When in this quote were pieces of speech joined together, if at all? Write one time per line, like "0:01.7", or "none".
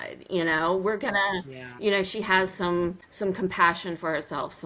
0:03.1